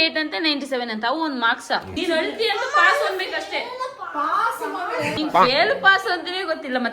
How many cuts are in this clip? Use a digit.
2